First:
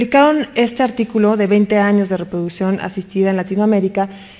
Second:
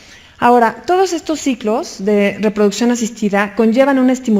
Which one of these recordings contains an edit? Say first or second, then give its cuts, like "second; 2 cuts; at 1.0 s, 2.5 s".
second; 1 cut; at 1.9 s